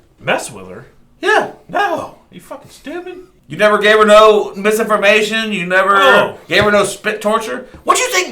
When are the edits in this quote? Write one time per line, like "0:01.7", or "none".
0:03.3